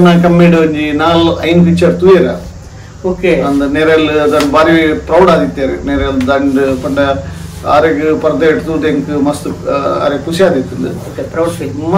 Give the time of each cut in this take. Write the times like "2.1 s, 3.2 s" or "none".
none